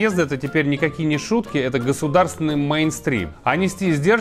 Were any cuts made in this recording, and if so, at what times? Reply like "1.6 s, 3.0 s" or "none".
3.3 s